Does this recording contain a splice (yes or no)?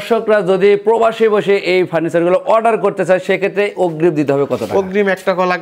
no